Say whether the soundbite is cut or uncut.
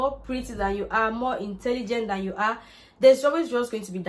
uncut